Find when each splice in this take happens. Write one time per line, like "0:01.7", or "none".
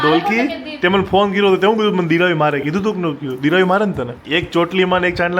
0:04.1